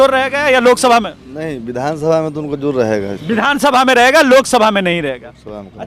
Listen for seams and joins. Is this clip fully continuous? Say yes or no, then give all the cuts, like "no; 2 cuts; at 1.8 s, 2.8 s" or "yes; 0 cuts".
yes; 0 cuts